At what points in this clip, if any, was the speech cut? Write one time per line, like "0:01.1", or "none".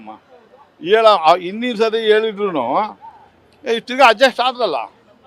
none